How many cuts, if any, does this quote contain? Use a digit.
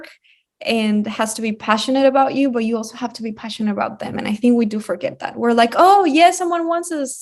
0